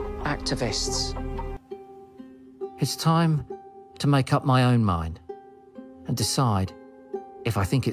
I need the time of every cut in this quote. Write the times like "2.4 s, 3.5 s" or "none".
1.5 s